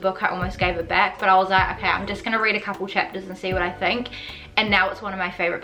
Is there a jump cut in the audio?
no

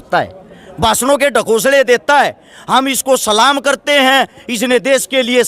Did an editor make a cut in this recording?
no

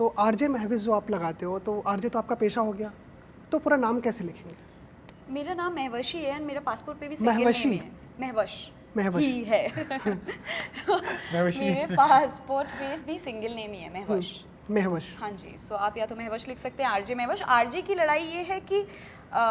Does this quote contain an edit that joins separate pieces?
no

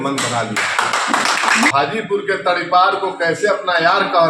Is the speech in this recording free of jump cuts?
no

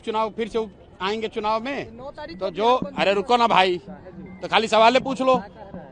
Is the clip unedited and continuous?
yes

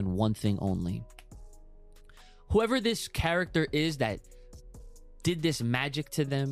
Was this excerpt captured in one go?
yes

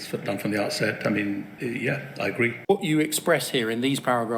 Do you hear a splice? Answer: yes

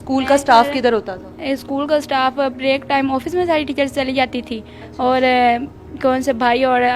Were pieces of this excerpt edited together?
no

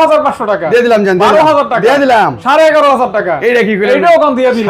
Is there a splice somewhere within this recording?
no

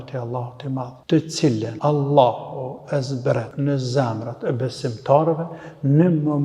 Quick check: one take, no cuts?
no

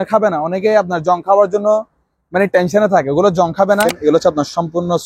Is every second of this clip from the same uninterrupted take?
no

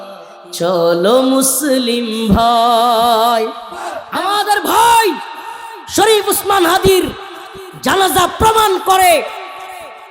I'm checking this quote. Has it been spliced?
yes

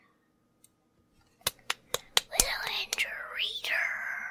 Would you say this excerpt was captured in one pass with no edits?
no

